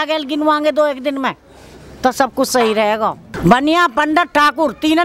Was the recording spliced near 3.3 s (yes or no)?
yes